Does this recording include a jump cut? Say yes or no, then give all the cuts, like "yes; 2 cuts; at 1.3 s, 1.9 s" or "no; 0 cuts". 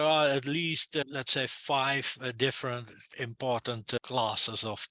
yes; 3 cuts; at 1.0 s, 3.1 s, 4.0 s